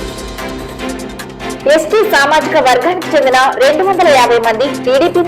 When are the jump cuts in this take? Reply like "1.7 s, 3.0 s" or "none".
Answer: 1.6 s